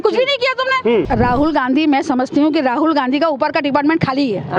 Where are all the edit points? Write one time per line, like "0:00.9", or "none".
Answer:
0:01.1